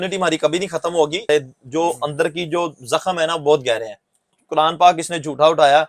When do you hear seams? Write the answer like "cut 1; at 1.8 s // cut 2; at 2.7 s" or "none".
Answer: cut 1; at 1.3 s // cut 2; at 4.4 s